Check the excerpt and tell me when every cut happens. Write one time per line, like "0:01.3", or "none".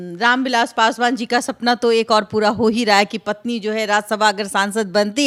none